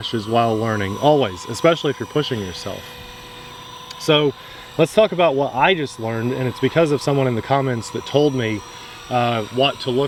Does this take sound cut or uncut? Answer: uncut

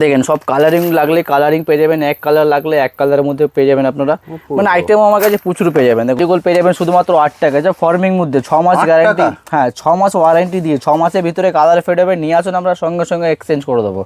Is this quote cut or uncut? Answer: cut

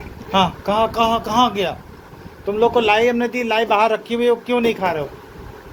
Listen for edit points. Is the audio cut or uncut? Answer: uncut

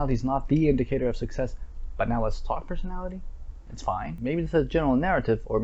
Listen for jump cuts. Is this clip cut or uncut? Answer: cut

